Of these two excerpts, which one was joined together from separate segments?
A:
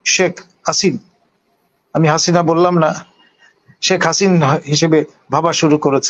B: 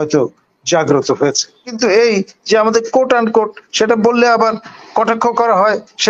B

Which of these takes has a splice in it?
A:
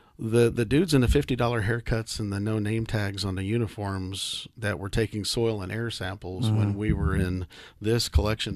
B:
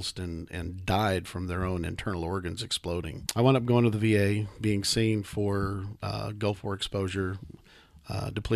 B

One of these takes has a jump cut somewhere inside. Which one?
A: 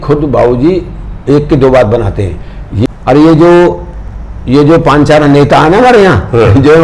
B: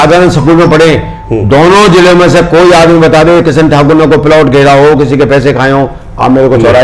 A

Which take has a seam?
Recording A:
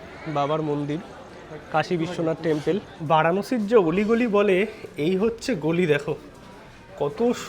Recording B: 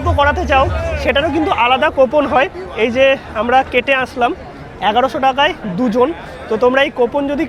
A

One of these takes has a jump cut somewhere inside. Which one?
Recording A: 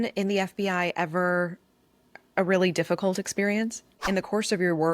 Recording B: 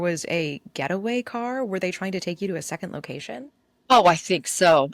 A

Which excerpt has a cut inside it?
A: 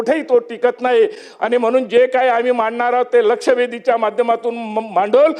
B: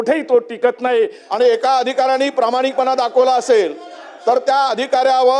B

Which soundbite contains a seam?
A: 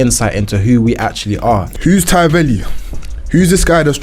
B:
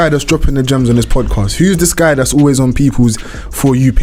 A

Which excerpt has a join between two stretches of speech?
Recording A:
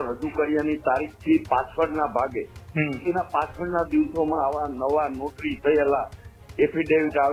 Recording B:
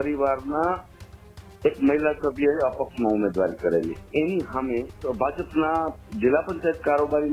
B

